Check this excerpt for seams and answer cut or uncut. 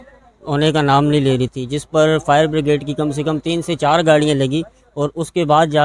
uncut